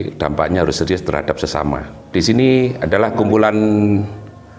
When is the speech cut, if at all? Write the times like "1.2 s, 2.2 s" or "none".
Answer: 2.0 s